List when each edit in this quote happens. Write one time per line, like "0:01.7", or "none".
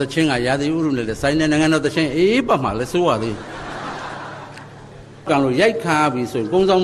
0:05.3